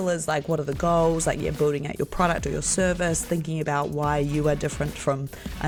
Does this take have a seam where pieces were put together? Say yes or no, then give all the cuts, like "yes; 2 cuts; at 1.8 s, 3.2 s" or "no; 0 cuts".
no; 0 cuts